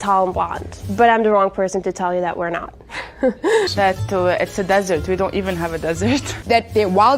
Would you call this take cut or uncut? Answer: cut